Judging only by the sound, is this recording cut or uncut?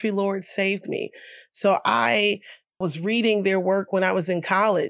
uncut